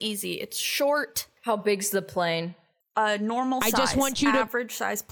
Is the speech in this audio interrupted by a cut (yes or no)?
yes